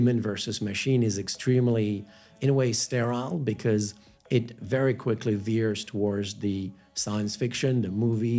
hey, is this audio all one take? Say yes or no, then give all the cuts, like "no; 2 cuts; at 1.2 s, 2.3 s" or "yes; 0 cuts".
yes; 0 cuts